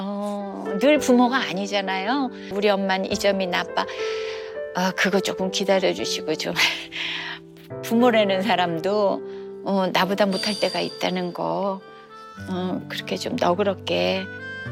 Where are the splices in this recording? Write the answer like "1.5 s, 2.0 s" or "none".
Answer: 2.5 s